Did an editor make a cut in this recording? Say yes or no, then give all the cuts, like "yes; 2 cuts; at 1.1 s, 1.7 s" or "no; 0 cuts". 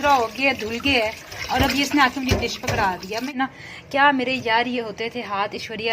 yes; 1 cut; at 3.3 s